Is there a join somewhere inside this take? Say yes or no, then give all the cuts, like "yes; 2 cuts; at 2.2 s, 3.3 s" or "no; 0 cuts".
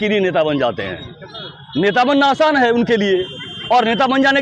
no; 0 cuts